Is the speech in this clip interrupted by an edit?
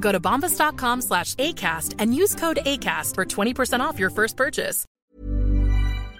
yes; 1 cut; at 4.8 s

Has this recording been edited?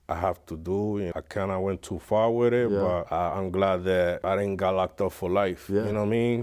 yes; 3 cuts; at 1.1 s, 3.1 s, 4.2 s

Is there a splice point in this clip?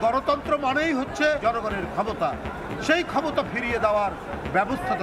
yes; 1 cut; at 1.4 s

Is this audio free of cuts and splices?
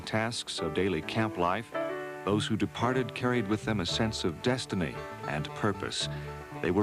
no; 1 cut; at 3.1 s

